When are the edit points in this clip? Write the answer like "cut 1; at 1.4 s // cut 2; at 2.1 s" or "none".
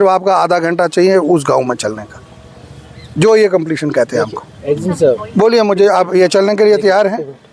none